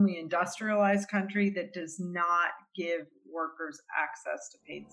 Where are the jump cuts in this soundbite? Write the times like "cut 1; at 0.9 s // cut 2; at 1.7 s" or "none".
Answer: none